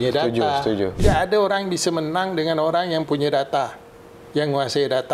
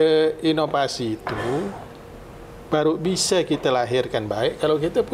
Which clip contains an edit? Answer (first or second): first